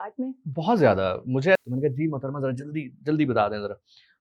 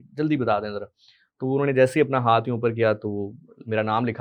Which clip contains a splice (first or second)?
first